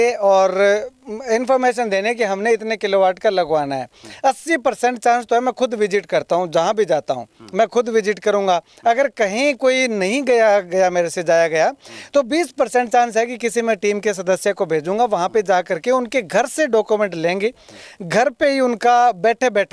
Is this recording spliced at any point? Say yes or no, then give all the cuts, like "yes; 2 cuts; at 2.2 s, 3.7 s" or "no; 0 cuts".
no; 0 cuts